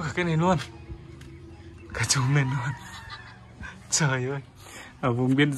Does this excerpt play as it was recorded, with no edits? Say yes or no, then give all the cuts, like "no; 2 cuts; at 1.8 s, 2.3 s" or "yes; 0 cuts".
yes; 0 cuts